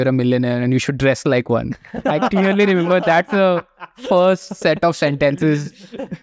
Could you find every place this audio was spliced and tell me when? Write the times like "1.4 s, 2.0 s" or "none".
none